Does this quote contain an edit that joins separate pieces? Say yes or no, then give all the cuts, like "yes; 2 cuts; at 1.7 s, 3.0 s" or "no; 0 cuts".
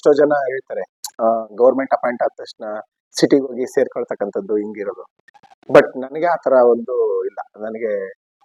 no; 0 cuts